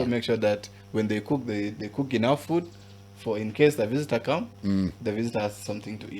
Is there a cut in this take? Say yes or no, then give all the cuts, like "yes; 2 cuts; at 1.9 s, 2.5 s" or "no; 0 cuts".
no; 0 cuts